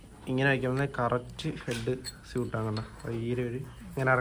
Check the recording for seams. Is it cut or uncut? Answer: uncut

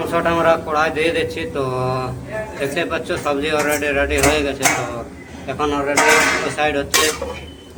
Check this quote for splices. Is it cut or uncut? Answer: uncut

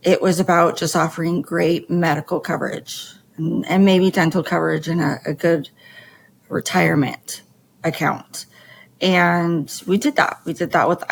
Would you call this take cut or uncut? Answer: uncut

